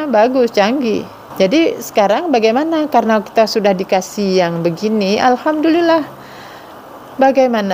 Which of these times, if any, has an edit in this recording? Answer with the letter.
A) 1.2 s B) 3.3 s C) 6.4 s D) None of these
A